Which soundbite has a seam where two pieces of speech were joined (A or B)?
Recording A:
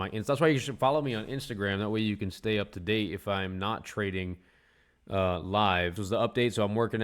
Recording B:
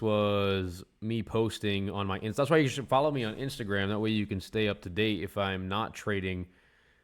A